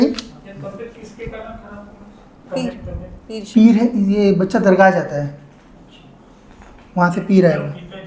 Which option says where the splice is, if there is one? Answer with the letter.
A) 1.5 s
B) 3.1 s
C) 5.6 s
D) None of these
D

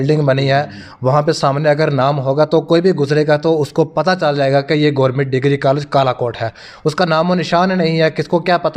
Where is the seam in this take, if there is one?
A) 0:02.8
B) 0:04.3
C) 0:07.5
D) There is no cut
D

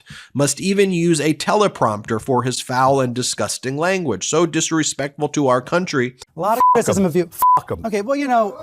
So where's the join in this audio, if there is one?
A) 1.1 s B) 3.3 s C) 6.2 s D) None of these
C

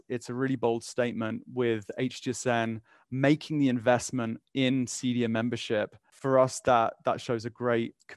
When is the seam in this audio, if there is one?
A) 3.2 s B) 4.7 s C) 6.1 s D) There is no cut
C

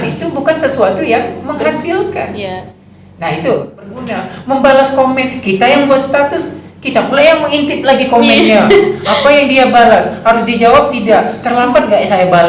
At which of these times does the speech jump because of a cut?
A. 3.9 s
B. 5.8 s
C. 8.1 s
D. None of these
A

